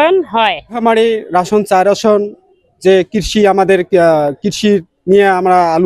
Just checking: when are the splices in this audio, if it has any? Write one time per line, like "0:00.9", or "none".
none